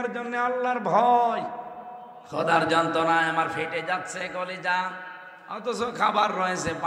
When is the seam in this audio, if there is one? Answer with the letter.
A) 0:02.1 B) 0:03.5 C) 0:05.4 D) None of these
A